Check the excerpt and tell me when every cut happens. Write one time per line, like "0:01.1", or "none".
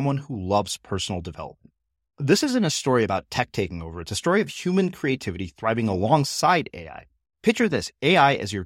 none